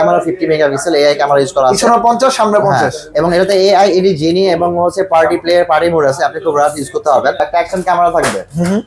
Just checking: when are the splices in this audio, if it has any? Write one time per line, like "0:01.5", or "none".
0:07.4